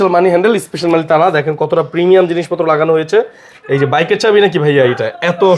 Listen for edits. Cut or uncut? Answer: uncut